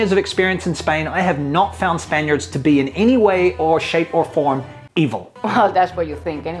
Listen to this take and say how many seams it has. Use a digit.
1